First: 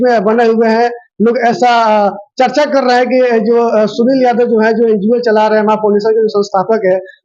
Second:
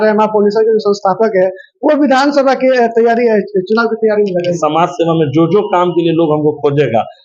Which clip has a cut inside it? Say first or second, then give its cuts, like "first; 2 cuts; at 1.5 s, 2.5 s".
second; 1 cut; at 4.6 s